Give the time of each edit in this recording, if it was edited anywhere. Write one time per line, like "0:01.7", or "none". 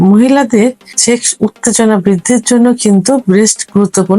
0:00.9